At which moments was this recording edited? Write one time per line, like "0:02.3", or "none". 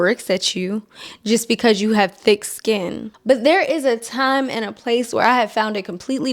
0:03.1